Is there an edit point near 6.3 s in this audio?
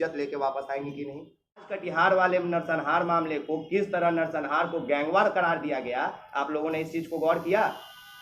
no; 1 cut; at 1.8 s

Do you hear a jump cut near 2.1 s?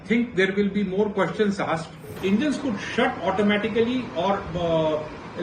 yes; 1 cut; at 2.1 s

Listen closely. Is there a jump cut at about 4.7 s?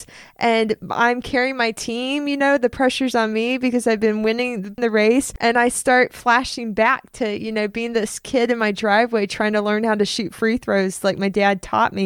yes; 1 cut; at 4.7 s

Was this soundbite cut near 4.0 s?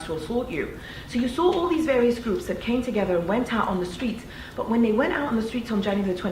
yes; 1 cut; at 4.0 s

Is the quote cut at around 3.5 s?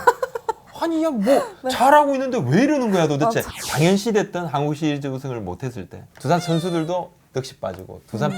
yes; 1 cut; at 3.5 s

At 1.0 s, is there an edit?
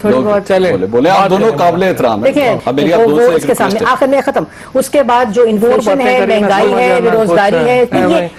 no; 0 cuts

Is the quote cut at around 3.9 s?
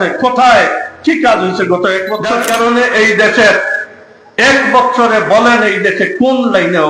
no; 1 cut; at 2.4 s

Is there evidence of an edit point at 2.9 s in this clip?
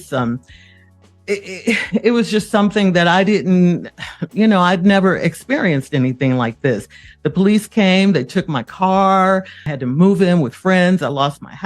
no; 1 cut; at 9.7 s

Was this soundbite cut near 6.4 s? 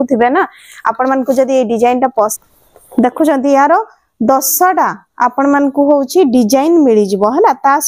no; 1 cut; at 2.3 s

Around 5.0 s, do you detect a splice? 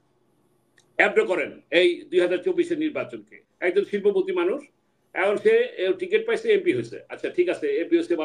no; 1 cut; at 3.5 s

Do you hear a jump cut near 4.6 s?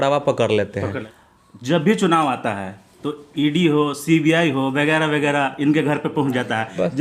no; 1 cut; at 0.9 s

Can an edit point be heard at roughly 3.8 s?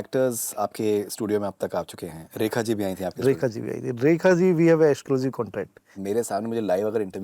no; 2 cuts; at 2.2 s, 6.0 s

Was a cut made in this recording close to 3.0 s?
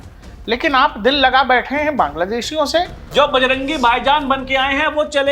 yes; 1 cut; at 3.0 s

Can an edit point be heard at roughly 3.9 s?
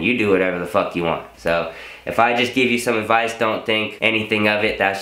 yes; 1 cut; at 3.9 s

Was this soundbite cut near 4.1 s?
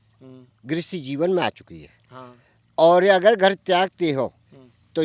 no; 0 cuts

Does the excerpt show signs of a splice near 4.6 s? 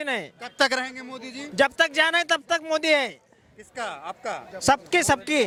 no; 0 cuts

